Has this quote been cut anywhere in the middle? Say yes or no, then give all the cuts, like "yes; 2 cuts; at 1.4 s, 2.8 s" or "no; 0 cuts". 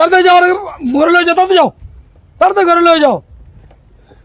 no; 0 cuts